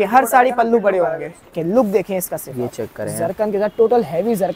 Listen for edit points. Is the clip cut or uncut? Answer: cut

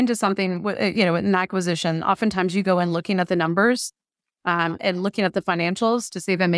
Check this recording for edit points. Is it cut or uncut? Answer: uncut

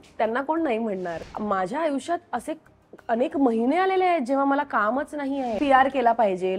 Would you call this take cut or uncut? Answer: cut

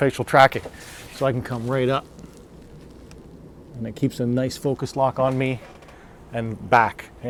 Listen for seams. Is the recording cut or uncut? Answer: uncut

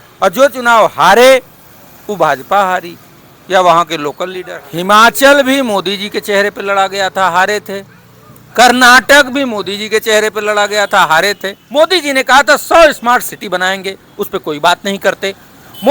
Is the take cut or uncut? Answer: cut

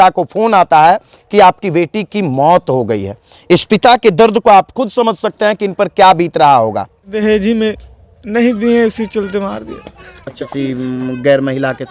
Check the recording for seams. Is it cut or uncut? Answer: cut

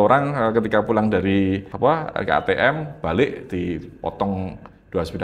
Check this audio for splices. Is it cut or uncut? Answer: cut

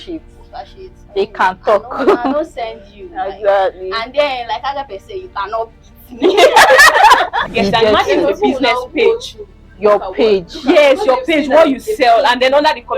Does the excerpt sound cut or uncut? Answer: cut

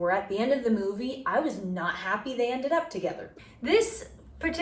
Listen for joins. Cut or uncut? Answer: cut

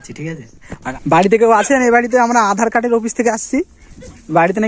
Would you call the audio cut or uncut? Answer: cut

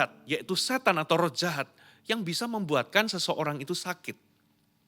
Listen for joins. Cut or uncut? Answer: uncut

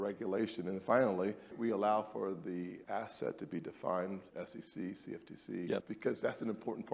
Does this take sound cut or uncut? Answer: cut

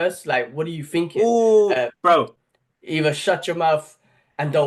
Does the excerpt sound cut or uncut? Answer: cut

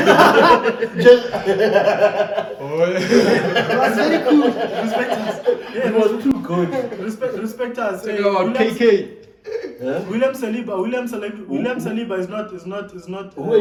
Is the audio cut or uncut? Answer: uncut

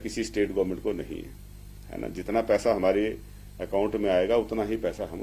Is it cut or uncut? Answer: uncut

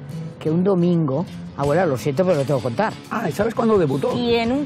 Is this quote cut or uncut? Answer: cut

